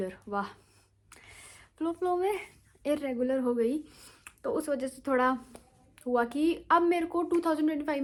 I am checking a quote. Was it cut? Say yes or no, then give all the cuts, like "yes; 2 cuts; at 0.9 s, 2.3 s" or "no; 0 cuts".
no; 0 cuts